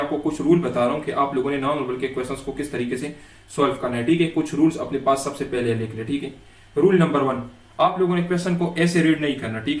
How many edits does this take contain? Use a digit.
0